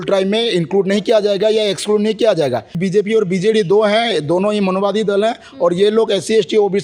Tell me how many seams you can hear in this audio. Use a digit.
1